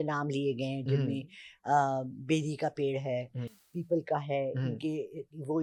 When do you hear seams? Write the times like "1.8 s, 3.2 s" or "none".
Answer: none